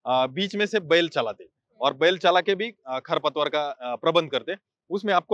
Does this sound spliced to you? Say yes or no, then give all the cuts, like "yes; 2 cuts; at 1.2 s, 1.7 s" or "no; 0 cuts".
no; 0 cuts